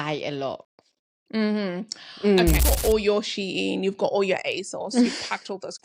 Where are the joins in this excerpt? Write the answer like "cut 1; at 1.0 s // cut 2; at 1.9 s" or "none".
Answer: cut 1; at 2.6 s